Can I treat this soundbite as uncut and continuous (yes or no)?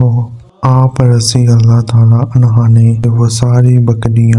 no